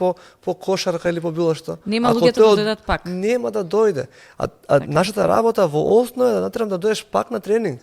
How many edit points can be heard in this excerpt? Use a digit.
0